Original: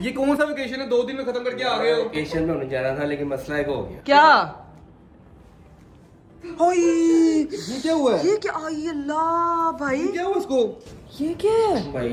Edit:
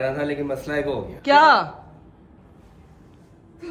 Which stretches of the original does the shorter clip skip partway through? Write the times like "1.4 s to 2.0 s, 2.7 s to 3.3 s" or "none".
none